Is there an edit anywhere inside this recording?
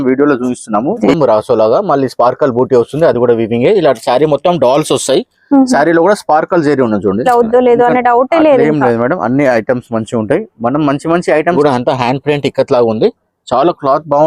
yes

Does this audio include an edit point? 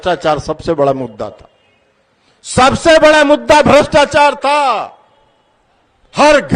no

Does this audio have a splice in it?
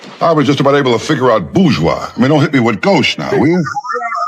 no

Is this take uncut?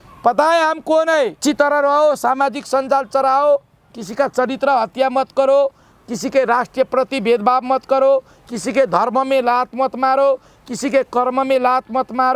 no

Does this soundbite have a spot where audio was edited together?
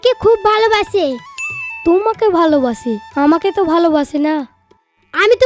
no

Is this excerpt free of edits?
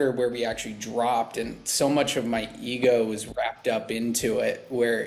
yes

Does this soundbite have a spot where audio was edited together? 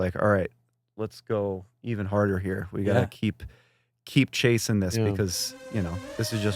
no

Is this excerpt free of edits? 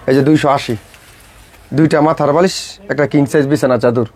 yes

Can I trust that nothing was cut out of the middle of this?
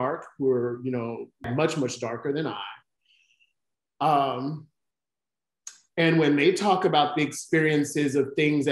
no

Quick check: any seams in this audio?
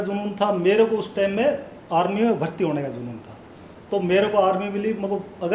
no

